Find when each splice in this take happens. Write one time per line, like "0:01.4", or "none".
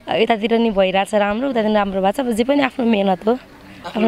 none